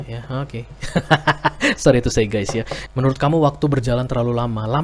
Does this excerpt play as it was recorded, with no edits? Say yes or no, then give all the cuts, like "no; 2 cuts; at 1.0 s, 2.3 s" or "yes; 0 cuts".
no; 1 cut; at 2.8 s